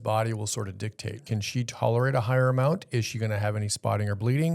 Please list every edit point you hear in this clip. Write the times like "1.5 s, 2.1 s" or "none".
1.2 s